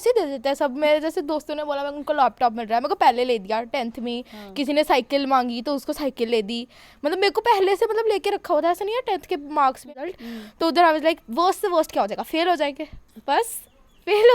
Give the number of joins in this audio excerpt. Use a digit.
1